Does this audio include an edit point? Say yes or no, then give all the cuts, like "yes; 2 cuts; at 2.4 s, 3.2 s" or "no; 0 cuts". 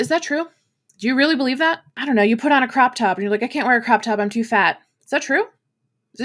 yes; 1 cut; at 2.0 s